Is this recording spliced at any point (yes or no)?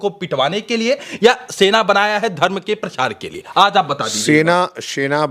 no